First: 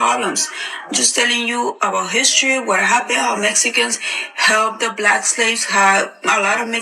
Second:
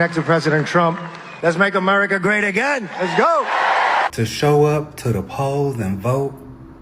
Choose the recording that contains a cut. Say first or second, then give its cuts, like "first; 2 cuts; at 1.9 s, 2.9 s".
second; 1 cut; at 4.1 s